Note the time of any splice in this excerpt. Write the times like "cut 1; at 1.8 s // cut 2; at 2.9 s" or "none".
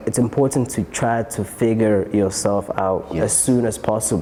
none